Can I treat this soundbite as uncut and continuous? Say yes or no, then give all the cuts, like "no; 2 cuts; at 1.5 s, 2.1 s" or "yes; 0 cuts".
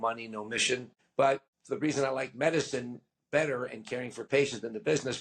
no; 2 cuts; at 1.0 s, 1.5 s